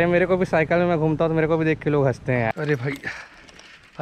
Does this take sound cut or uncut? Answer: cut